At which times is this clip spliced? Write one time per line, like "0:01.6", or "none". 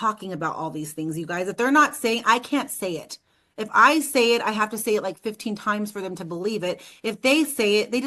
none

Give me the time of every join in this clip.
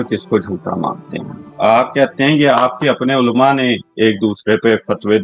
none

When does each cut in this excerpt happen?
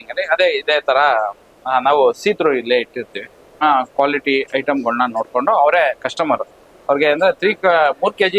0:03.6

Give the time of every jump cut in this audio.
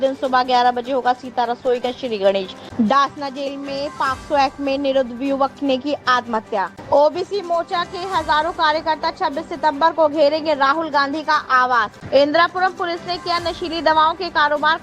0:02.6
0:06.8
0:12.0

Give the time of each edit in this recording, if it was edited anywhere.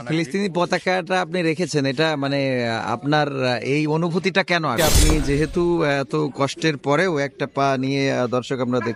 0:04.8

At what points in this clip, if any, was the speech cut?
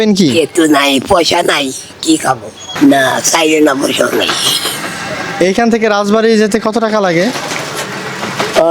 0:02.6

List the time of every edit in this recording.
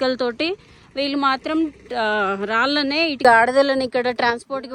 0:03.2

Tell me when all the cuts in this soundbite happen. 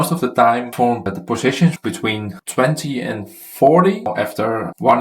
0:01.1
0:04.1

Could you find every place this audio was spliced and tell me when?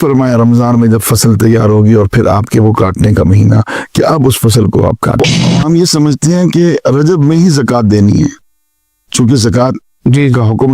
0:05.6

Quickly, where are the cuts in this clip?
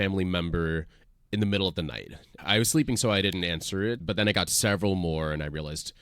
0:02.3

